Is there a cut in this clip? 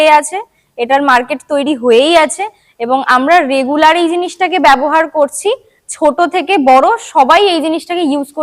no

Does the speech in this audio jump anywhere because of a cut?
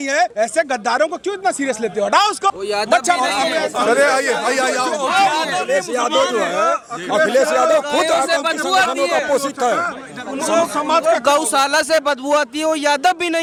no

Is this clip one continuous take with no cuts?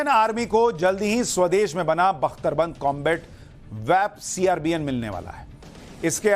no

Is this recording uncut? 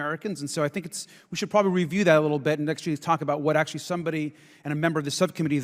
yes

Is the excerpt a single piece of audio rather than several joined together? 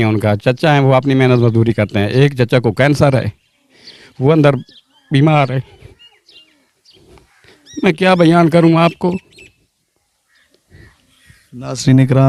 yes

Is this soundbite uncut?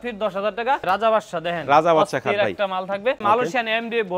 no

